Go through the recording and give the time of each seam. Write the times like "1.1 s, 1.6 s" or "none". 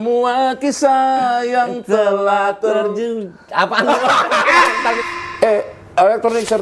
5.0 s